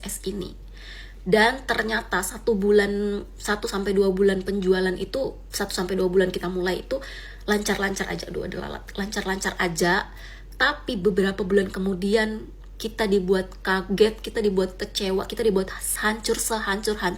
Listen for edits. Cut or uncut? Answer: uncut